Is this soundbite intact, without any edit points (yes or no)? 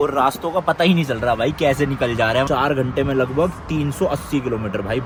yes